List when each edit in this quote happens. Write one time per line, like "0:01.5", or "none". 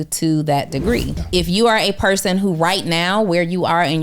0:01.2